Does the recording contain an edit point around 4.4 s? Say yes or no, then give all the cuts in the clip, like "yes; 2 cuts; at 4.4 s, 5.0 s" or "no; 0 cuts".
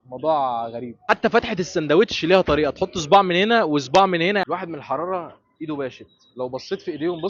yes; 2 cuts; at 1.0 s, 4.4 s